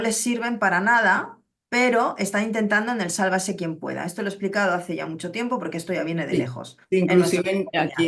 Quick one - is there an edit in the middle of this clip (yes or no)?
no